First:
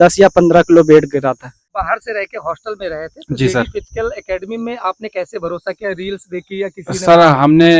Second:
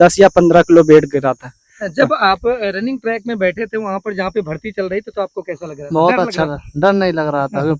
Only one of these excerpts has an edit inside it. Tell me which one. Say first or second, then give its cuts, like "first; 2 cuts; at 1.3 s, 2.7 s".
first; 1 cut; at 1.8 s